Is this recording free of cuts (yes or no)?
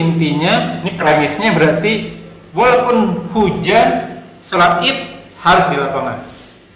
yes